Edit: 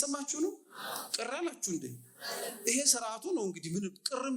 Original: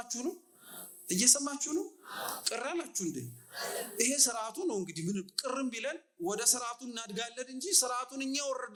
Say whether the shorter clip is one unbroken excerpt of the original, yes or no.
yes